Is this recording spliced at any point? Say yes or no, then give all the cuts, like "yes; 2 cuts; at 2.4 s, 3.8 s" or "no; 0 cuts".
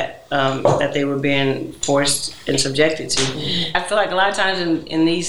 yes; 1 cut; at 3.7 s